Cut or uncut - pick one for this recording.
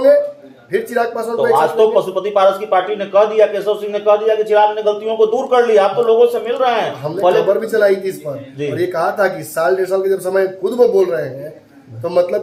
uncut